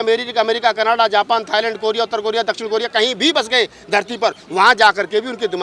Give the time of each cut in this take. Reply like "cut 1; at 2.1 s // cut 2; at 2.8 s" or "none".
none